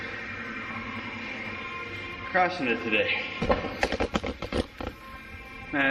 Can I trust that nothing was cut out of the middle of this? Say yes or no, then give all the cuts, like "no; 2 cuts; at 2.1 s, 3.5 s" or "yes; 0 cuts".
yes; 0 cuts